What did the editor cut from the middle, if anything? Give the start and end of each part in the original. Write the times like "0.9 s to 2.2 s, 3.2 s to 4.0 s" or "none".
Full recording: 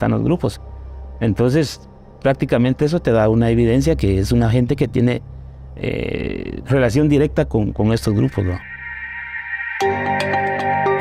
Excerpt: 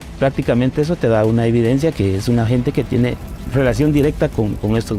5.4 s to 6.5 s

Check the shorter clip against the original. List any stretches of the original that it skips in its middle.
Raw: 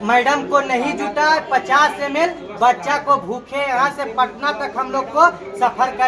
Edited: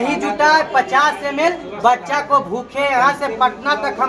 none

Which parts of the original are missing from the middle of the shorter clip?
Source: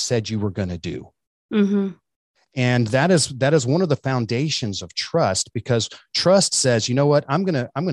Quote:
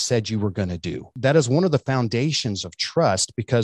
1.1 s to 3.3 s

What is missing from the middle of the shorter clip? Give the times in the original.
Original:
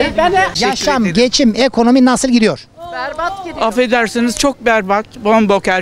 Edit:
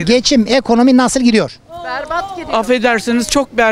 none

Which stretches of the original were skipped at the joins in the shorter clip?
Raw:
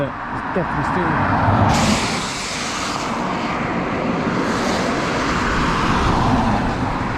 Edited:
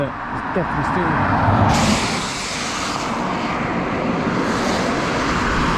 none

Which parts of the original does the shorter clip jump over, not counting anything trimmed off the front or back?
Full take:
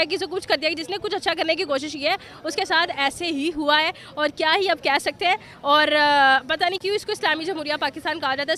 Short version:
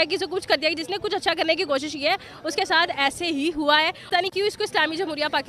4.0 s to 6.5 s

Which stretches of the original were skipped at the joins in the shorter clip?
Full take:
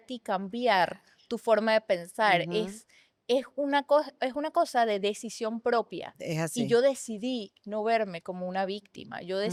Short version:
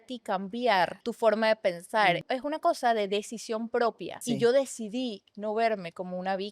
1.0 s to 1.3 s, 2.5 s to 4.1 s, 6.1 s to 6.5 s

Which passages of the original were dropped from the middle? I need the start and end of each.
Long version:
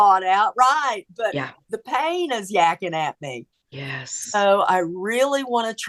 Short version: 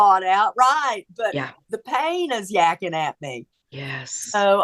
none

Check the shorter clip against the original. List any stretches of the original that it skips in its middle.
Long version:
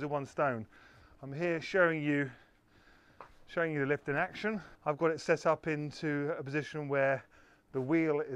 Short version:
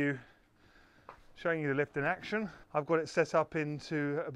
none

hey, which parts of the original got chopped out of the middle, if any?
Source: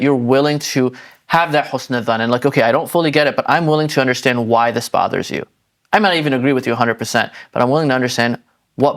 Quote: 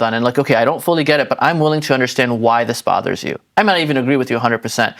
5.4 s to 5.7 s

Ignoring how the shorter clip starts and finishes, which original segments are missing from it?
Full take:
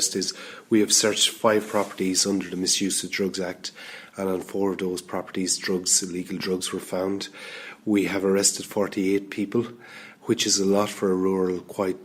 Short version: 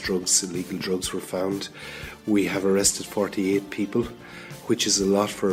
none

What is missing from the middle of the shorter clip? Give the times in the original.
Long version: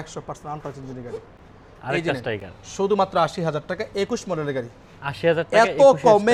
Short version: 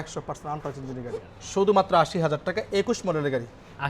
1.4 s to 2.6 s

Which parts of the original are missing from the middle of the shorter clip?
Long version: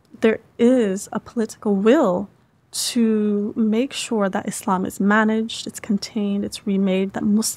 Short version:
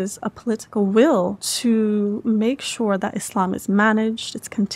2.3 s to 2.8 s

